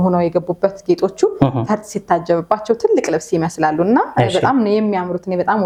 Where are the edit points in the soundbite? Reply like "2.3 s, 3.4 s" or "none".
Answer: none